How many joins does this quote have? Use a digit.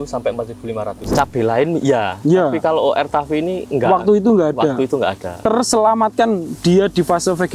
3